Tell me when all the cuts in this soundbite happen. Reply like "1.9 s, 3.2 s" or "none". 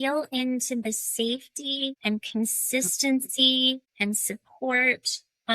2.0 s, 3.9 s